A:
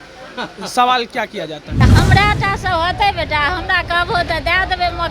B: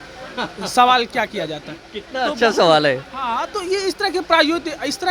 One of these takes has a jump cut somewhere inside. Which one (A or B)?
A